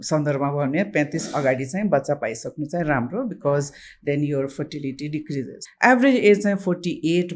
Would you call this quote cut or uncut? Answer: cut